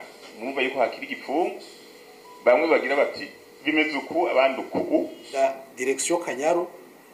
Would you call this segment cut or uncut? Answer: cut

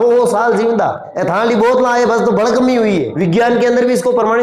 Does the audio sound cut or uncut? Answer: cut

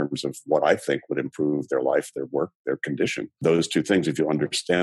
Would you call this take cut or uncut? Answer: cut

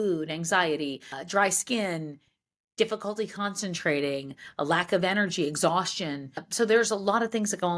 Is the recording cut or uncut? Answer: cut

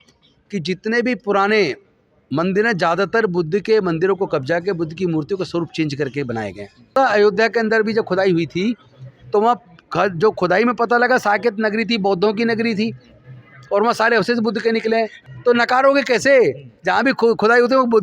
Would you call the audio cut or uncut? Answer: cut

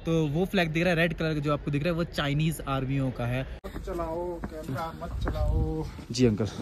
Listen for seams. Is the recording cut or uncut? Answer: cut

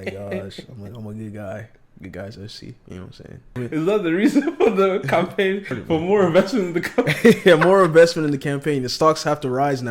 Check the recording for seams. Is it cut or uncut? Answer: cut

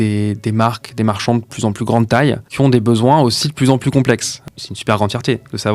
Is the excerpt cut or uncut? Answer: cut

